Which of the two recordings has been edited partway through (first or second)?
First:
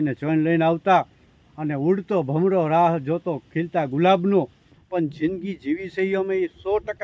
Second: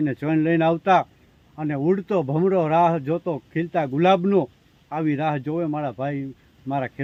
first